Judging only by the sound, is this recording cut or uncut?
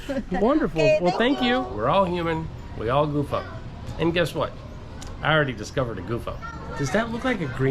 cut